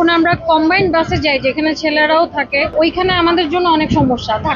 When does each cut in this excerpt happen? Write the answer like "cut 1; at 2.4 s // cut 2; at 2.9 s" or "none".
cut 1; at 2.7 s